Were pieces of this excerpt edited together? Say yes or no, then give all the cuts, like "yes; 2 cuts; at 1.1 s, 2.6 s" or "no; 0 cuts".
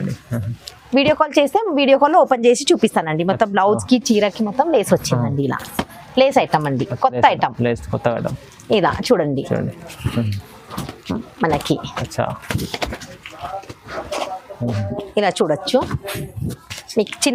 no; 0 cuts